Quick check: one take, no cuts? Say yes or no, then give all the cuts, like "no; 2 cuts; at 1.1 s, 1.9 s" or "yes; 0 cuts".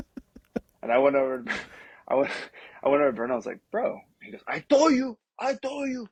yes; 0 cuts